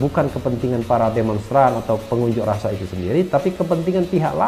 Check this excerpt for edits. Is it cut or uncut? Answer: uncut